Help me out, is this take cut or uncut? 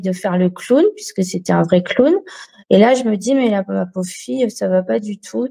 uncut